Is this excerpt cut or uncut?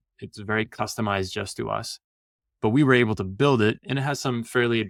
uncut